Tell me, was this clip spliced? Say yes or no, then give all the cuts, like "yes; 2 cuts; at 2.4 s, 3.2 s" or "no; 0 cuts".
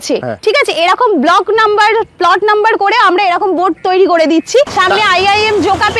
yes; 1 cut; at 4.8 s